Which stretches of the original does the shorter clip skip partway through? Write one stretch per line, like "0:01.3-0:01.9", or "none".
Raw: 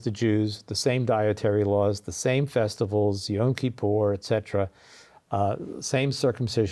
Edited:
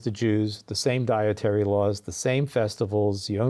none